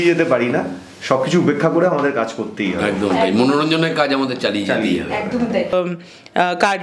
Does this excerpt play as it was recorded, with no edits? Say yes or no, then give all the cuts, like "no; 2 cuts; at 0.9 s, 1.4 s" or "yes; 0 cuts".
no; 1 cut; at 5.7 s